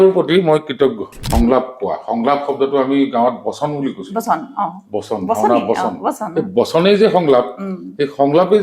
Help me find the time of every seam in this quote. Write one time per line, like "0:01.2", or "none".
0:01.2